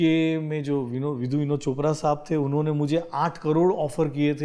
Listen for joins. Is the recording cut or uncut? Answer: uncut